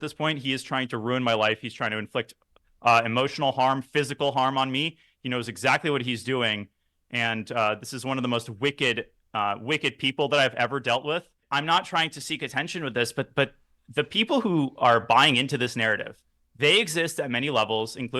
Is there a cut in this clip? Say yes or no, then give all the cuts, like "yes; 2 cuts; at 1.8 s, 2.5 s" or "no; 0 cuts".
yes; 1 cut; at 11.4 s